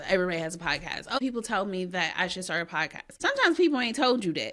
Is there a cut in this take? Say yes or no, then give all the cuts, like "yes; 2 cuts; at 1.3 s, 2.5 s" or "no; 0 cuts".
yes; 2 cuts; at 1.1 s, 3.0 s